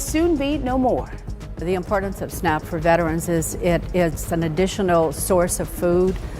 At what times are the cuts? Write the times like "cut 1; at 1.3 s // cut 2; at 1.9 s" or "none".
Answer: cut 1; at 1.7 s